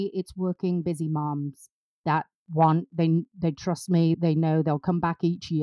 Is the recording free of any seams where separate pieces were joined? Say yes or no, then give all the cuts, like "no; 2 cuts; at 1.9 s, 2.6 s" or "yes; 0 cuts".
no; 1 cut; at 2.9 s